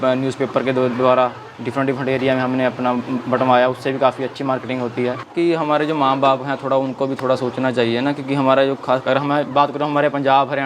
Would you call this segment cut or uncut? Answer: cut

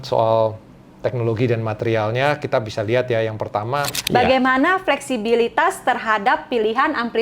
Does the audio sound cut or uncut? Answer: cut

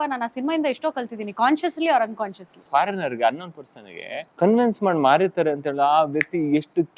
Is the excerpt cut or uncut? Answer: cut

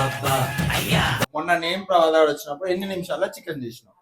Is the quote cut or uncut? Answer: cut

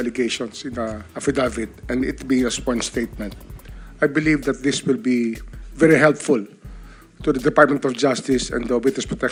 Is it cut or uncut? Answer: uncut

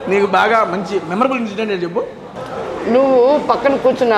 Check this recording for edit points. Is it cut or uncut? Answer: uncut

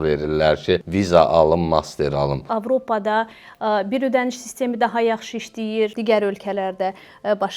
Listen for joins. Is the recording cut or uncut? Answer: cut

